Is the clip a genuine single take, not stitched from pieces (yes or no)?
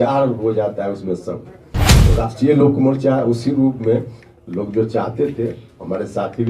yes